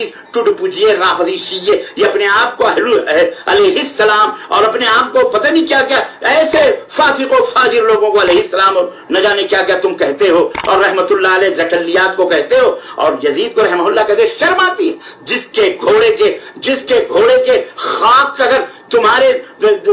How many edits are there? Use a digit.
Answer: 0